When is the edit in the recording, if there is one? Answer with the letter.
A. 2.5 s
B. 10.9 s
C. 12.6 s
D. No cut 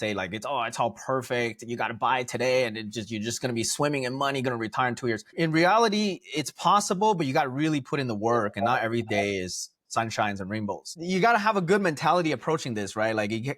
B